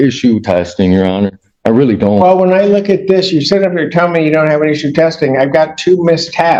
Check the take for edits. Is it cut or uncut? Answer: uncut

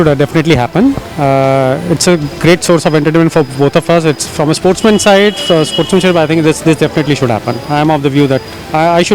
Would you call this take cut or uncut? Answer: uncut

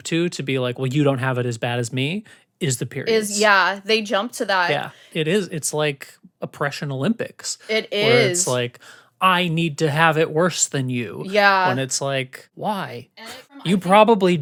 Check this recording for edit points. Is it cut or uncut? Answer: uncut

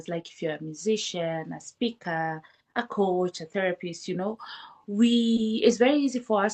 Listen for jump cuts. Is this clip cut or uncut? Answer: uncut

